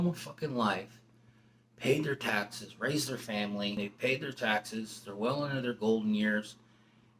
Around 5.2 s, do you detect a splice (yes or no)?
no